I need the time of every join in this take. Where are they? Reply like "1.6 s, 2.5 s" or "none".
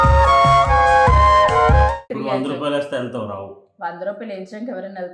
2.1 s